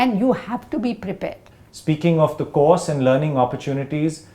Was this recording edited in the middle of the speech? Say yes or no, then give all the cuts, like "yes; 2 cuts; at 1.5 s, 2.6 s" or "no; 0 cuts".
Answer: no; 0 cuts